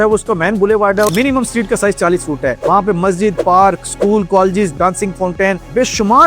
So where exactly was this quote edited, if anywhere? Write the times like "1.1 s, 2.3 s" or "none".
1.1 s, 4.7 s

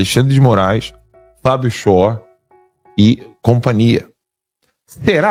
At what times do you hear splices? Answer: none

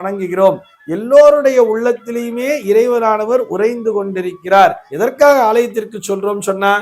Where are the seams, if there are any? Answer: 4.9 s

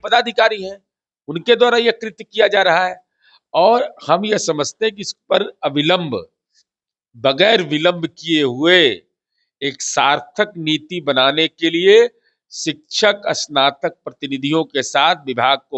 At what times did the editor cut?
none

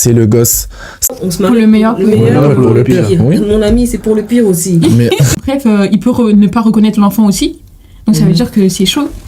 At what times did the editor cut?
1.1 s, 5.4 s

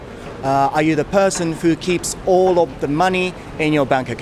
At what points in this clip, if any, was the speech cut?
none

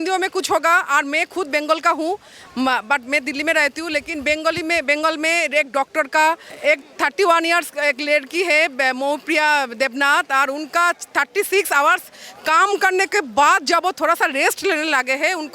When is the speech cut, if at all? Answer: 6.5 s

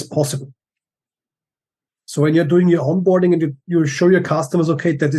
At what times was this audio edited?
none

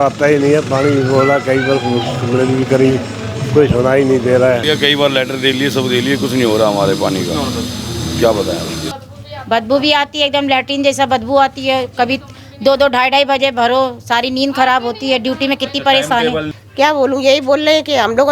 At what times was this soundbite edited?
4.6 s, 8.8 s, 16.6 s

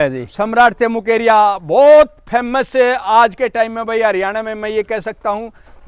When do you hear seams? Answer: none

